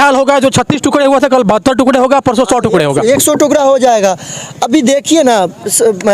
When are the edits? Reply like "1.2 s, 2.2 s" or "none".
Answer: none